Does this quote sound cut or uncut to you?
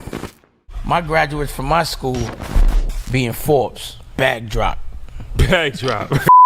uncut